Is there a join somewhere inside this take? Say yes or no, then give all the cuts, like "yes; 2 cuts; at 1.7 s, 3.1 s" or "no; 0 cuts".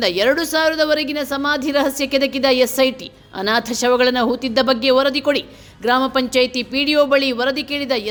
no; 0 cuts